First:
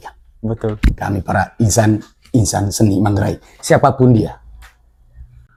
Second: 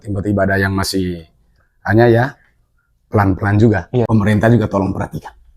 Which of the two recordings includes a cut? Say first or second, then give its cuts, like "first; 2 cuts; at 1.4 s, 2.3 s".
second; 1 cut; at 4.1 s